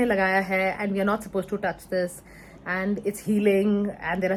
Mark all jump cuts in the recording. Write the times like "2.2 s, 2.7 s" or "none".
none